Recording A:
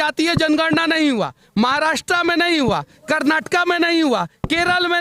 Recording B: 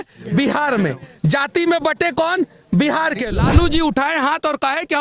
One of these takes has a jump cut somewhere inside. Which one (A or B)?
B